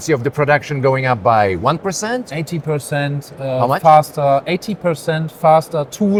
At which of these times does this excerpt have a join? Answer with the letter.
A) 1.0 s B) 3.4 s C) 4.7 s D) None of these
D